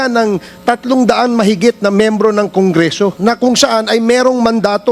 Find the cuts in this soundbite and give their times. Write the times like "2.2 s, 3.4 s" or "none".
3.2 s